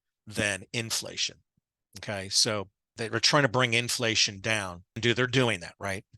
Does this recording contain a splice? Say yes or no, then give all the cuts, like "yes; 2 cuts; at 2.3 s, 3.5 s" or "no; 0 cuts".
yes; 2 cuts; at 2.9 s, 5.0 s